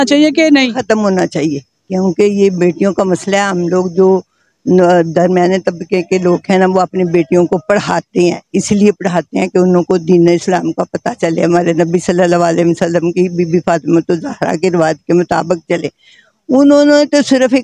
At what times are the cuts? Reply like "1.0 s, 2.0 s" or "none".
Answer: none